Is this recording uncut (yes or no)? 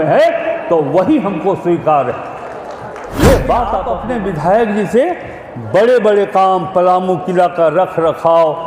no